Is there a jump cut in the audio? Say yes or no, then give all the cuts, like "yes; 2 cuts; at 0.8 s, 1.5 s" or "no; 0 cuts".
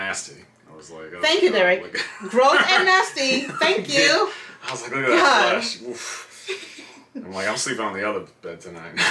no; 0 cuts